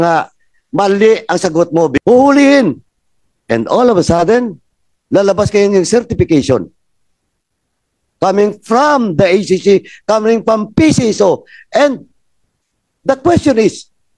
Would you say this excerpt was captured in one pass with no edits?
no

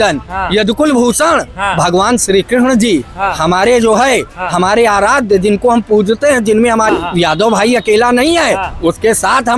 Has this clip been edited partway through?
yes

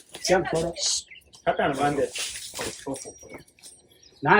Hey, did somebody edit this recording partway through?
no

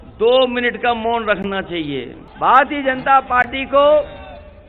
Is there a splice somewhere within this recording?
no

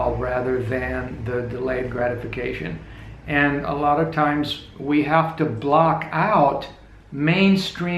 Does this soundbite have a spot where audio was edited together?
no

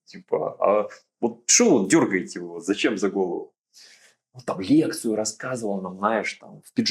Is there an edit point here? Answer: no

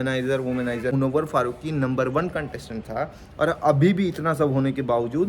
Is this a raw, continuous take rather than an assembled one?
no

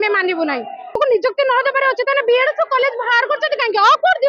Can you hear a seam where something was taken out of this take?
yes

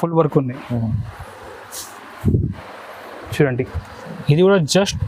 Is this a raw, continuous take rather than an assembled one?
yes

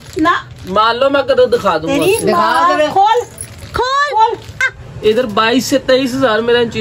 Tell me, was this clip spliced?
yes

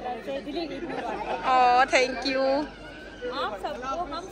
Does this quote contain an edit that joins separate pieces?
no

